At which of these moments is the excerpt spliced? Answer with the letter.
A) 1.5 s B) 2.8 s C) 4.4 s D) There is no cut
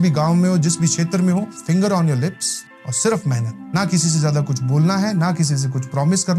A